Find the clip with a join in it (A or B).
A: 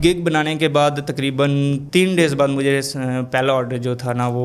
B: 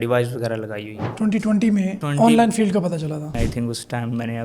B